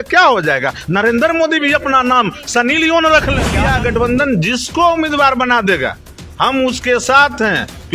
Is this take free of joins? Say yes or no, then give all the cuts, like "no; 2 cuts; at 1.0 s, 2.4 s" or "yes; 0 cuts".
no; 1 cut; at 3.5 s